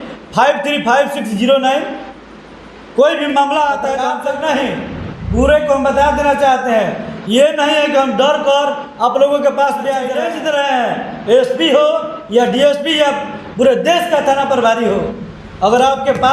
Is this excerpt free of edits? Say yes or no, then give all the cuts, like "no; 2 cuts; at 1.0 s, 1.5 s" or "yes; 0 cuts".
no; 2 cuts; at 4.1 s, 10.2 s